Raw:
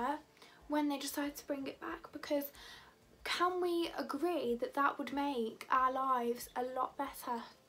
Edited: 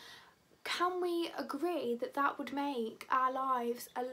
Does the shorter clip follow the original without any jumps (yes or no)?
yes